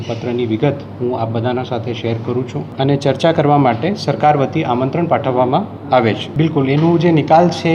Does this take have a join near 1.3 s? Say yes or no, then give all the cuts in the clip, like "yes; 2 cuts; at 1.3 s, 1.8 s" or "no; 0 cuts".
no; 2 cuts; at 2.6 s, 6.3 s